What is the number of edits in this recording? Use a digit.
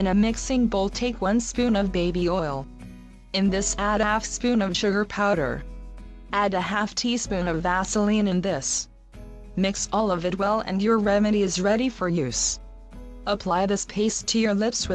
0